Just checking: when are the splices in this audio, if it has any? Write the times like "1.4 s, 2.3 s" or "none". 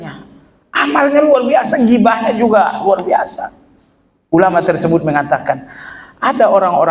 none